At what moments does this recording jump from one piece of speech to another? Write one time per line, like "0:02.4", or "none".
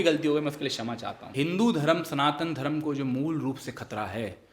0:01.3